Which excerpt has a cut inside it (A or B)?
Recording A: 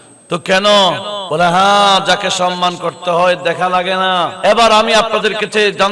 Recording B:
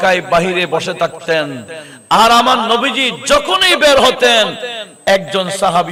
A